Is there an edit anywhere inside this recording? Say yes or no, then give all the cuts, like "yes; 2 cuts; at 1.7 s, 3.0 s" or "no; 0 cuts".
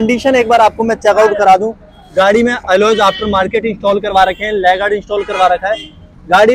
no; 0 cuts